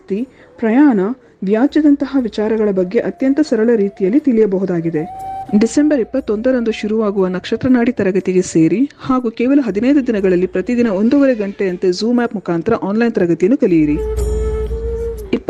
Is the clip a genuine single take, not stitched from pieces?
yes; 0 cuts

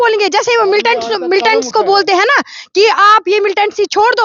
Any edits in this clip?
no; 0 cuts

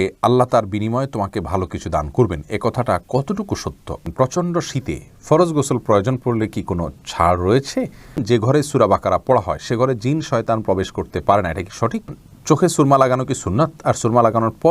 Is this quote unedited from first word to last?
no; 3 cuts; at 4.0 s, 8.2 s, 12.1 s

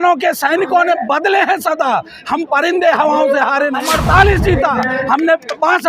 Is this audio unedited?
no; 1 cut; at 3.9 s

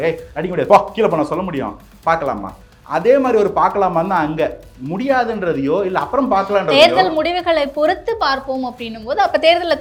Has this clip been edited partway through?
no; 0 cuts

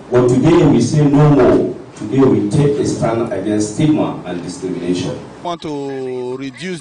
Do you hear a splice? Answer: yes; 1 cut; at 5.4 s

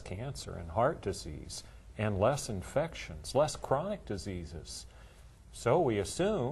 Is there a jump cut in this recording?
no; 0 cuts

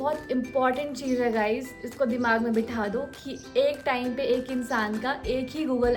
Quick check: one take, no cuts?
yes; 0 cuts

